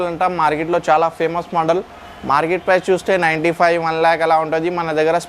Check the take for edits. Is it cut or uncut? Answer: uncut